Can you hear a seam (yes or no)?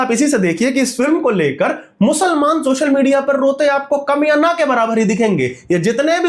no